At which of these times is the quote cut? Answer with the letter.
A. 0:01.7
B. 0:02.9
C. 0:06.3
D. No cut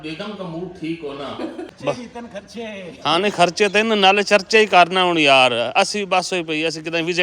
A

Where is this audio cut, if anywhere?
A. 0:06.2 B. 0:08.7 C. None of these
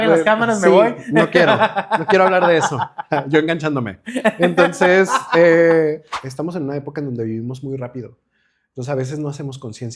A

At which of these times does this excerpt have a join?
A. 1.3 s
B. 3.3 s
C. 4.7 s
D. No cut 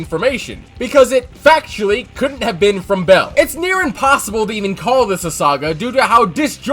B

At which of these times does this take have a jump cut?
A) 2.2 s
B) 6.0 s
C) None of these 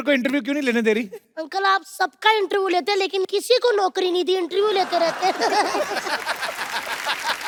C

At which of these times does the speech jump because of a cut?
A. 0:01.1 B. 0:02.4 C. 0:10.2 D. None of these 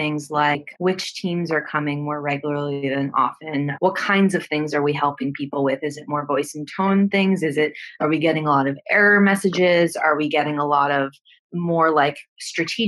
A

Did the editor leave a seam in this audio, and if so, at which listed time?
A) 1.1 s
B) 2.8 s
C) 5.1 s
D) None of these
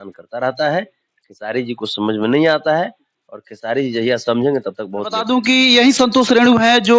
C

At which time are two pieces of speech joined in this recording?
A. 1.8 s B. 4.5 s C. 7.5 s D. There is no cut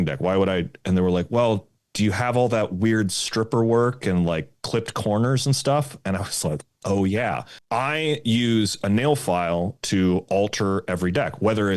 C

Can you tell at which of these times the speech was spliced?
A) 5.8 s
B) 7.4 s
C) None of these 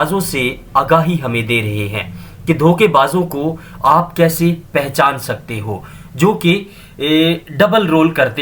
C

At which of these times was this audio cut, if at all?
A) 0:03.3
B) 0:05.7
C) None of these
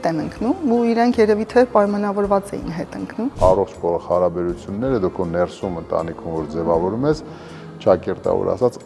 A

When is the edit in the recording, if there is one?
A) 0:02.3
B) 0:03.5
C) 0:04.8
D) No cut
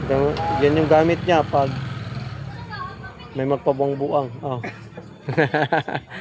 D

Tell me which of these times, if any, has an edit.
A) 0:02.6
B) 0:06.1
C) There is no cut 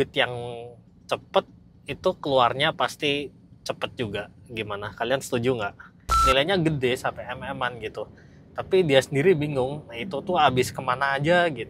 B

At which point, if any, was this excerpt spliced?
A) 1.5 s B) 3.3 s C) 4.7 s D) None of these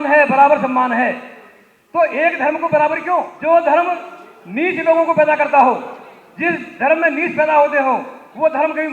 B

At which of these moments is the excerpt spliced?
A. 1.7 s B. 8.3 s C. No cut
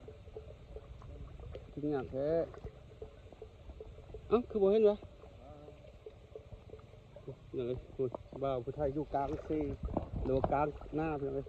A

